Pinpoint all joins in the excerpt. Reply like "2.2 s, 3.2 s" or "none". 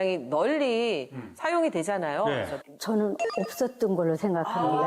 2.6 s